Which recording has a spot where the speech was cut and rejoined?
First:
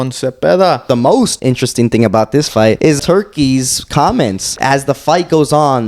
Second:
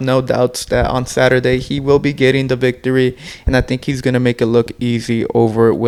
first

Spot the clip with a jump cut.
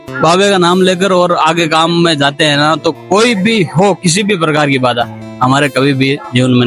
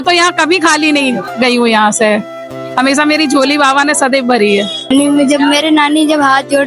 second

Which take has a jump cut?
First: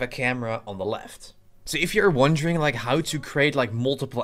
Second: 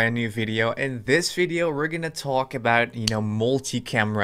first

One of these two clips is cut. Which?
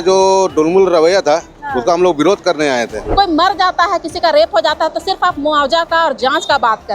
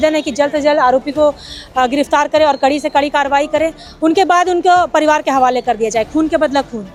first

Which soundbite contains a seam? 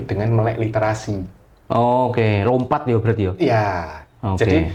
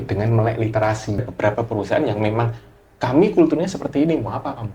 second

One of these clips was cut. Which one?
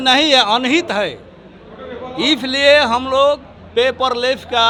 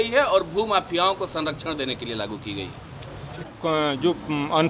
second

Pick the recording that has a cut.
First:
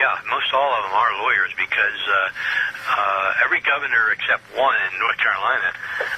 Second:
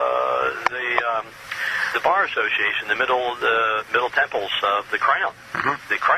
first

